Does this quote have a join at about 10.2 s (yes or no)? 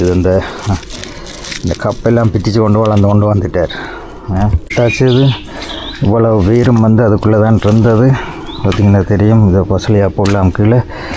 no